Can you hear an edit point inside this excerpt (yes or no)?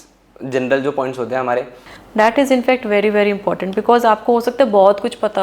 yes